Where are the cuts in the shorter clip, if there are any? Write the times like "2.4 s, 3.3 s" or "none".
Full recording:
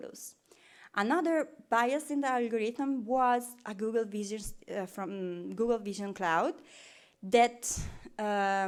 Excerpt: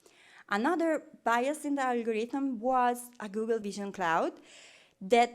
3.6 s

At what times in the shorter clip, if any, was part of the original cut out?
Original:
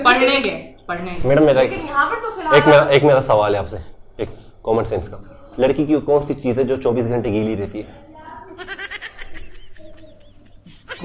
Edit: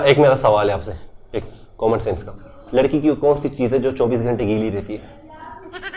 none

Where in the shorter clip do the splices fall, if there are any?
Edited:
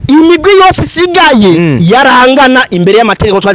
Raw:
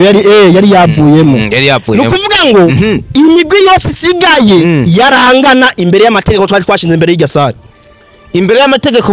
none

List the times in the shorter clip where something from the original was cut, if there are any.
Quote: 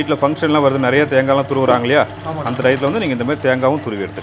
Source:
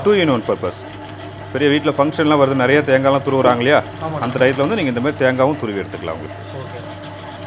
none

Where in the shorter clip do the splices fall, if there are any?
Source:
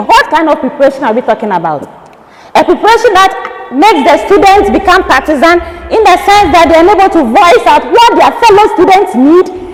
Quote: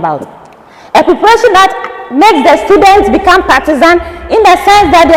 none

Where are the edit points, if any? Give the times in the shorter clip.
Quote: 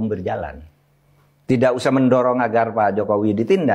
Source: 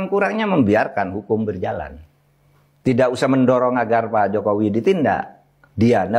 none

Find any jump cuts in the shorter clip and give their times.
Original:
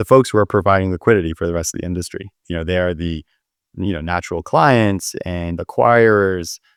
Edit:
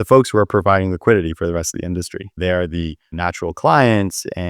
2.3 s, 3.1 s

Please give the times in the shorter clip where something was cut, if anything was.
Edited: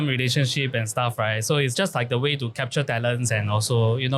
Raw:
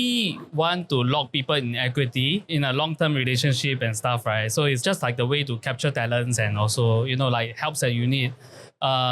none

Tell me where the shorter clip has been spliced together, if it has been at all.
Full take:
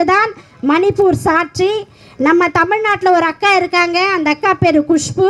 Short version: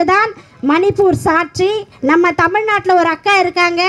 1.9 s

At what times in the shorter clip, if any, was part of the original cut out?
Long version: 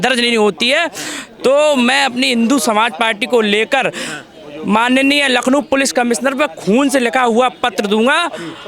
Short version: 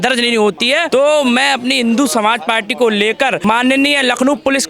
0.9 s, 3.4 s

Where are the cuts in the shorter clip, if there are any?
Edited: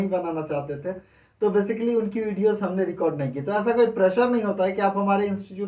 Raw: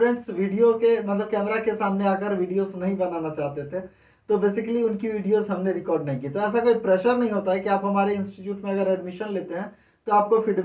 none

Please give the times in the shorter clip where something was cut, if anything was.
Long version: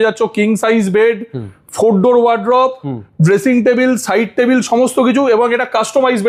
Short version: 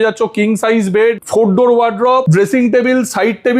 1.2 s, 2.3 s

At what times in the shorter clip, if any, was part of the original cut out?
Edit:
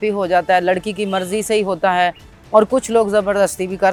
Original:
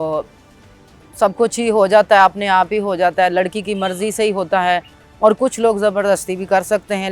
none

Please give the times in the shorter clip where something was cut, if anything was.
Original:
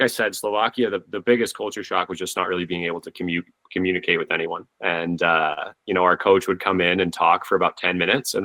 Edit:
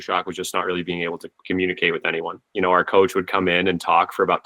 1.3 s, 2.4 s

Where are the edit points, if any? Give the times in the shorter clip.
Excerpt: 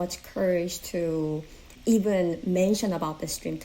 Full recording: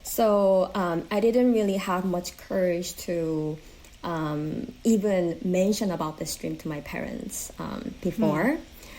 1.7 s

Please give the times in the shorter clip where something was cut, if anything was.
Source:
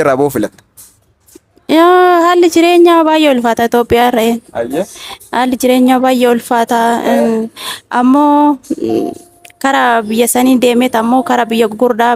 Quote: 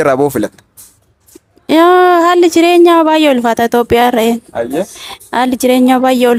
none

